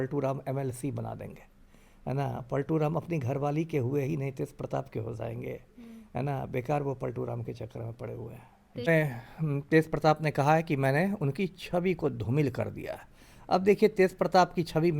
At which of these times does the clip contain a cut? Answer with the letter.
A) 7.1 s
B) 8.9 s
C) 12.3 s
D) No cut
B